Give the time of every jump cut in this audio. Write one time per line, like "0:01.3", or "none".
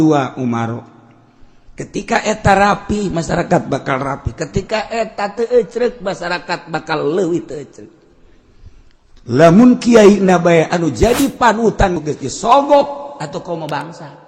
0:11.9